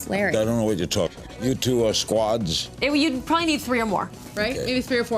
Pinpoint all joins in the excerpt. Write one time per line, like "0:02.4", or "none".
0:01.3